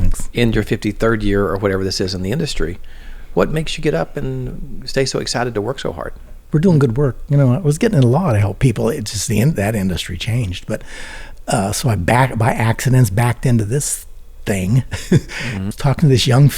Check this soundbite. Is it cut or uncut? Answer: cut